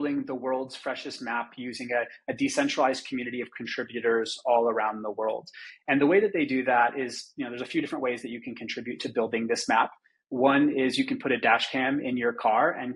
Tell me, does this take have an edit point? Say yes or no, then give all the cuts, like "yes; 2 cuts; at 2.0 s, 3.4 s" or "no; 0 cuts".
no; 0 cuts